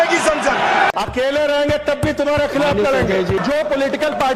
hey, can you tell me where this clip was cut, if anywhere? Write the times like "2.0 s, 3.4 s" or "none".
0.9 s